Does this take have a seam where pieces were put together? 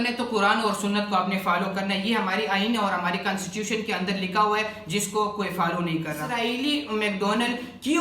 yes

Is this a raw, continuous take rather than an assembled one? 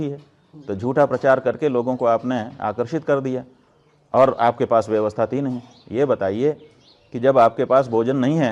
yes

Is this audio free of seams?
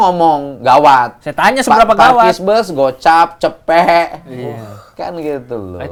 yes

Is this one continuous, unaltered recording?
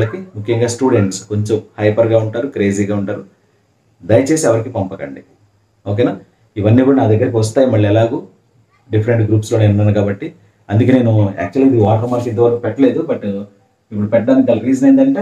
yes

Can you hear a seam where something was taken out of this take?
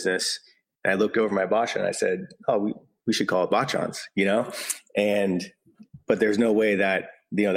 no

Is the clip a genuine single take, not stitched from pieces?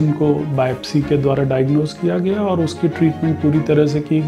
yes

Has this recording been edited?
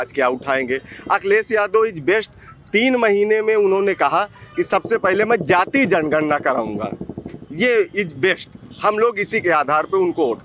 no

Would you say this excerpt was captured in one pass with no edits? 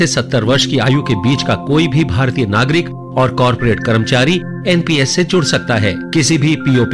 no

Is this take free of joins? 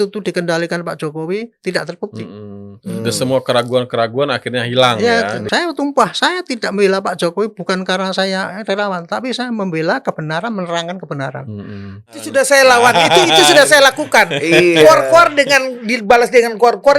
no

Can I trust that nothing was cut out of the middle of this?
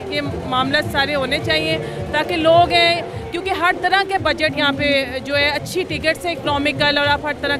yes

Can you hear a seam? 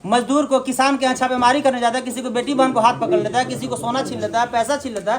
no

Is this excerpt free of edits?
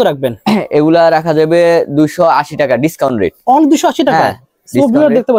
yes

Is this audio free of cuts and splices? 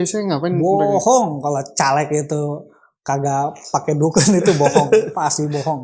yes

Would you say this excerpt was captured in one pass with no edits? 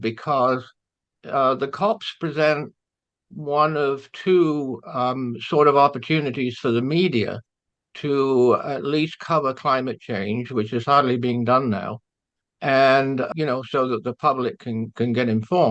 yes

